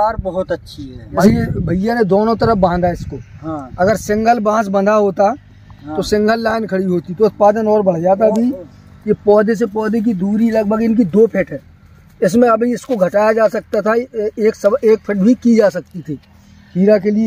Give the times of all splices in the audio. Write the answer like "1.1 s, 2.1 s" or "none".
1.2 s